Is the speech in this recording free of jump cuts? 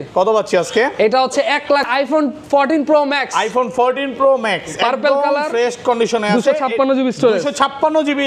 no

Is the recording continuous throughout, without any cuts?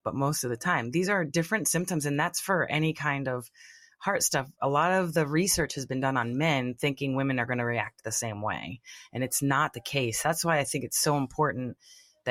yes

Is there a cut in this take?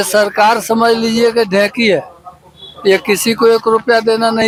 no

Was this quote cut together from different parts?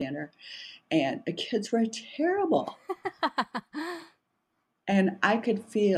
no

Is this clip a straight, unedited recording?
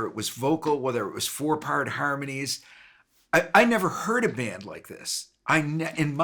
yes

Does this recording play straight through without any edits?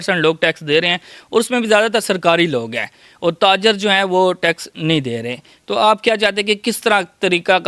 yes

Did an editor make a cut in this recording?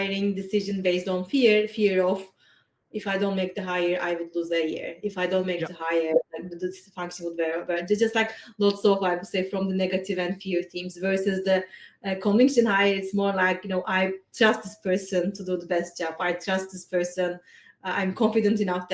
no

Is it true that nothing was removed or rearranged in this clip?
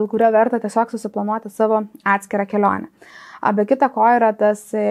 yes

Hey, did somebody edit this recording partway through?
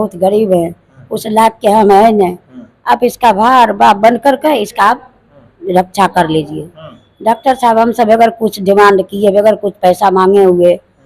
no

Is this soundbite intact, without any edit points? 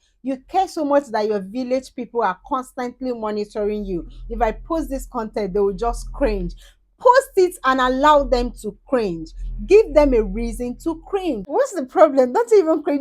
no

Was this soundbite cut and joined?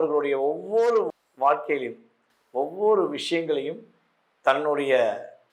no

